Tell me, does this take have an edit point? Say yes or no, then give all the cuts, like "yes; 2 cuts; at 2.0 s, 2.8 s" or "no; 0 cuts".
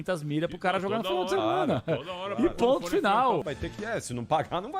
yes; 1 cut; at 3.5 s